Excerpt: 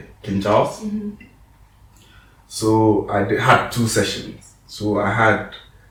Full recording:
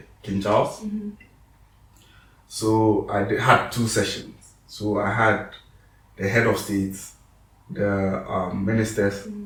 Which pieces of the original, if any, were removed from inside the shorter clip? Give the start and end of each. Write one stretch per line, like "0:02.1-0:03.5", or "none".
none